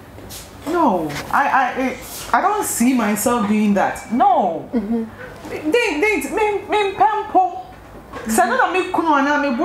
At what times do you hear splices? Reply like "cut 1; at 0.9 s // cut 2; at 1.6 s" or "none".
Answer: none